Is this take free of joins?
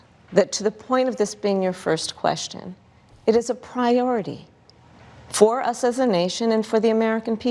no; 1 cut; at 6.3 s

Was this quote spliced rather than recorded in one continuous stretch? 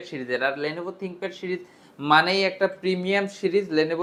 no; 0 cuts

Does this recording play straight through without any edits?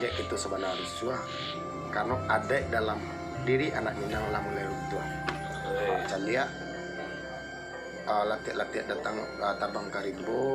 no; 1 cut; at 6.1 s

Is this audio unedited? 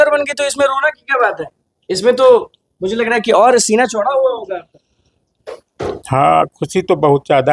yes; 0 cuts

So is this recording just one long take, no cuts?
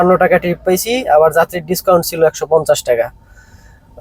yes; 0 cuts

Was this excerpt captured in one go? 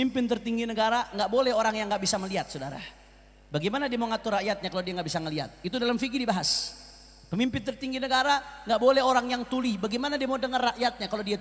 yes; 0 cuts

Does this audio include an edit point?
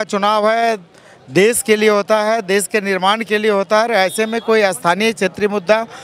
no; 0 cuts

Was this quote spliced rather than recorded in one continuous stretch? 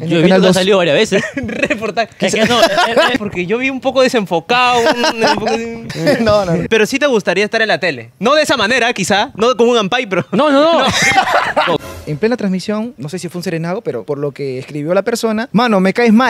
yes; 7 cuts; at 3.1 s, 5.8 s, 6.6 s, 11.8 s, 12.9 s, 14.0 s, 15.5 s

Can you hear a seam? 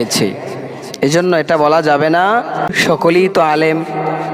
yes; 1 cut; at 2.7 s

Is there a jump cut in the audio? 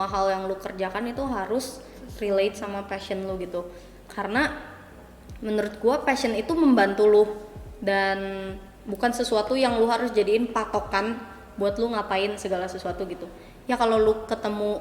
no; 0 cuts

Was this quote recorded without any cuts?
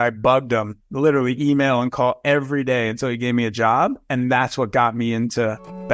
yes; 0 cuts

